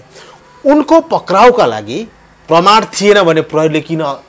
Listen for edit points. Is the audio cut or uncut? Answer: uncut